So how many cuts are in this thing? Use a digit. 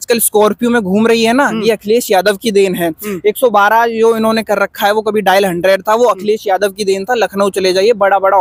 0